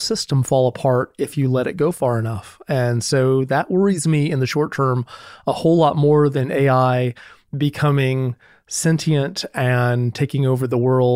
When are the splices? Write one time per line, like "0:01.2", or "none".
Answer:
none